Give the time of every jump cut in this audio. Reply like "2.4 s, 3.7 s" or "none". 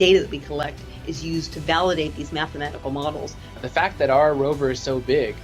3.6 s